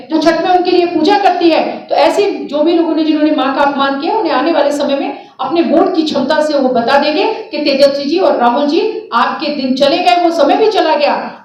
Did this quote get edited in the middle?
no; 0 cuts

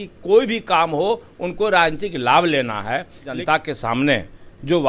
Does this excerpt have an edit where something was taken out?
yes; 1 cut; at 3.3 s

